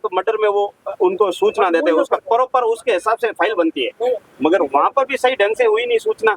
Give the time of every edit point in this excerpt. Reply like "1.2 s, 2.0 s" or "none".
none